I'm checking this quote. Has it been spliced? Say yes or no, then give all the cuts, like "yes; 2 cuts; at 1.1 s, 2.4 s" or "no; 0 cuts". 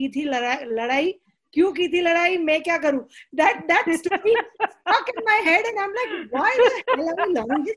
no; 0 cuts